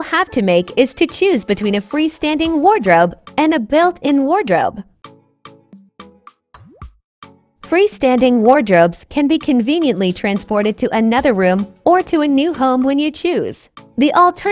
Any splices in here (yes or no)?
yes